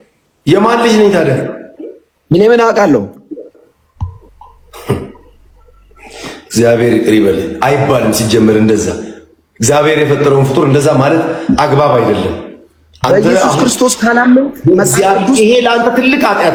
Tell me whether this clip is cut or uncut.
uncut